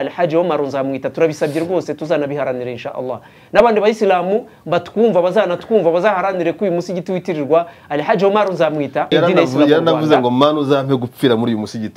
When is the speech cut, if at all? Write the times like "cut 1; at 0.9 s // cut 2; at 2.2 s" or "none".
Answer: cut 1; at 9.1 s

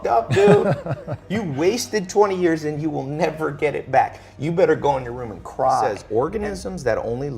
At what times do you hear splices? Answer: cut 1; at 6.0 s

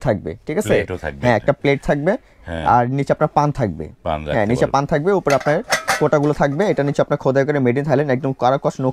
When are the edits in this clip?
none

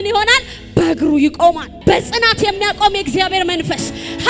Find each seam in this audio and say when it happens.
cut 1; at 1.7 s

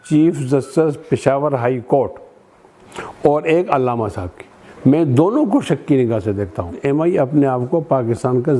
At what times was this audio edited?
cut 1; at 6.8 s

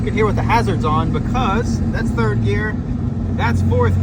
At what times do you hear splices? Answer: none

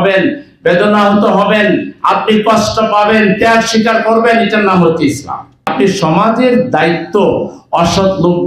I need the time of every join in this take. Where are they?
cut 1; at 5.7 s

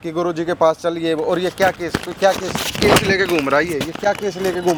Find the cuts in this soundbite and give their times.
none

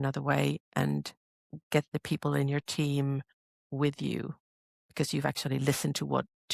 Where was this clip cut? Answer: none

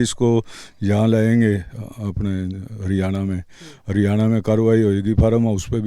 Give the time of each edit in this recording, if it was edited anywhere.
none

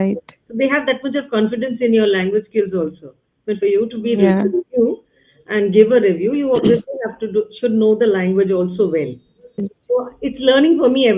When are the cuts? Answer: cut 1; at 9.7 s

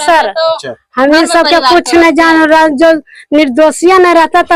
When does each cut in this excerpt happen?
none

